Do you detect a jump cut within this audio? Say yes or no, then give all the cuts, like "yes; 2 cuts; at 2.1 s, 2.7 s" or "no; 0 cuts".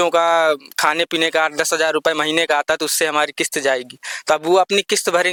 no; 0 cuts